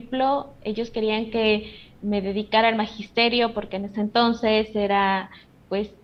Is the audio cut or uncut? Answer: uncut